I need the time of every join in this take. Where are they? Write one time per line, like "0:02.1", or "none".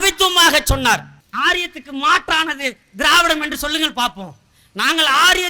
0:01.2

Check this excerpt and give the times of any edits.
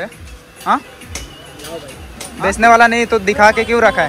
0:02.1

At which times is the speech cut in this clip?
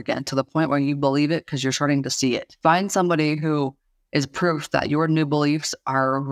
0:02.5

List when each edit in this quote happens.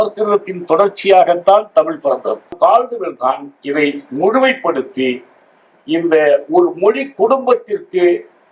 0:02.5

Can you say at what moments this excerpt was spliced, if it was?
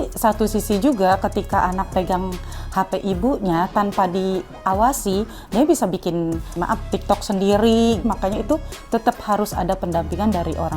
0:01.9
0:06.5
0:08.0

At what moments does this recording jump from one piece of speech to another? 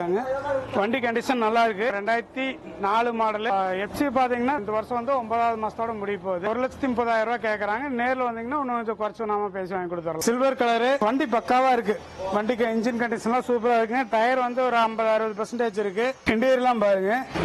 0:01.9
0:04.6
0:06.5
0:10.2

